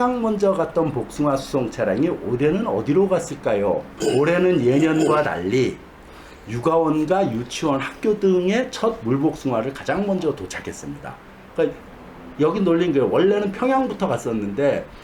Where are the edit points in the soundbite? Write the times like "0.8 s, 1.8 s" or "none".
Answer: 3.9 s, 8.7 s